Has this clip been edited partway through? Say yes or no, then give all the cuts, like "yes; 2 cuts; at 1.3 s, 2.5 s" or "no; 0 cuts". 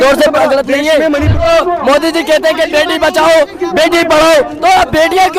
yes; 1 cut; at 1.3 s